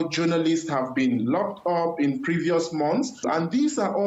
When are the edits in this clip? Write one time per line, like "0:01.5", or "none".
none